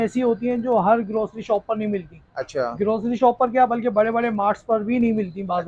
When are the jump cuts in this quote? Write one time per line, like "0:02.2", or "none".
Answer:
none